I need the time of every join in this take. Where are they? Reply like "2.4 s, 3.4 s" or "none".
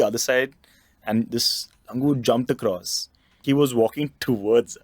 3.4 s